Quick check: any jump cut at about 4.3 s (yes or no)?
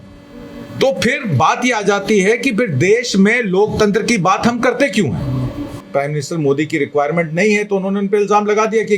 no